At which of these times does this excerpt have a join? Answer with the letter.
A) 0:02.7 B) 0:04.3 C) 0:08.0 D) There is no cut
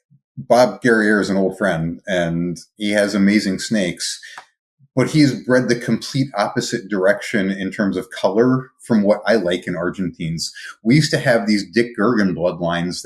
D